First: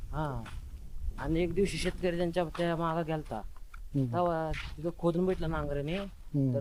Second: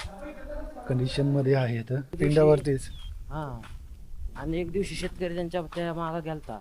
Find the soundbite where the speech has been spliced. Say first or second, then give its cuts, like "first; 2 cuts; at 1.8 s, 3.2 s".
second; 1 cut; at 2.2 s